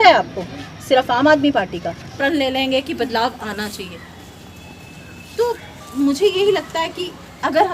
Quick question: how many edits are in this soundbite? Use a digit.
1